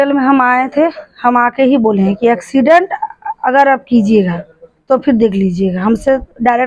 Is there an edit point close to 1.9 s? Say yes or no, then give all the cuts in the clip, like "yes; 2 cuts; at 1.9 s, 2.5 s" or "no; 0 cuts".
no; 0 cuts